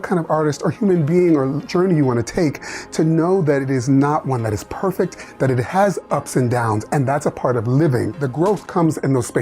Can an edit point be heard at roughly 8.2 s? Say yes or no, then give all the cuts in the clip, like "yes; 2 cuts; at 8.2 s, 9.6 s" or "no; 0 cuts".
yes; 1 cut; at 8.2 s